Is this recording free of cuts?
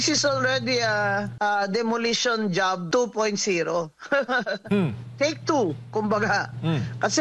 no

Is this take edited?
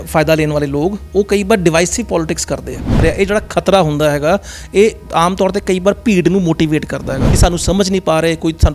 yes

